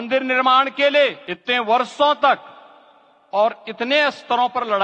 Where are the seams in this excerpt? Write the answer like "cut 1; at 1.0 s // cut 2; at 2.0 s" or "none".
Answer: cut 1; at 1.3 s